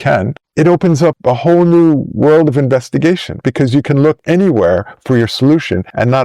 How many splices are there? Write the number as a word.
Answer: one